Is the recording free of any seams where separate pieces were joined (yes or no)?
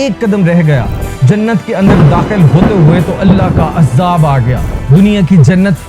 no